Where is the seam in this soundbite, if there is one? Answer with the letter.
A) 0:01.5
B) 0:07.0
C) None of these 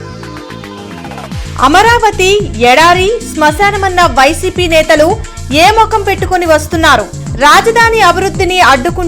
A